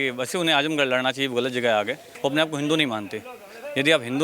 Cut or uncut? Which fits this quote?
cut